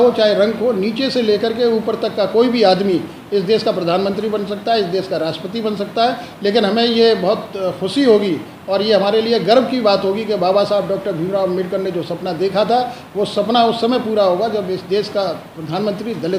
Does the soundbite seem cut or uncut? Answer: uncut